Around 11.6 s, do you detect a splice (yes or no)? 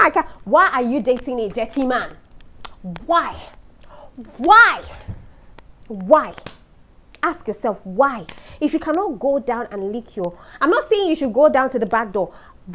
no